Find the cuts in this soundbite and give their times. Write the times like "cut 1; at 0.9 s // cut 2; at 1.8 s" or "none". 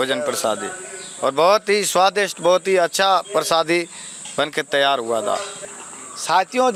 none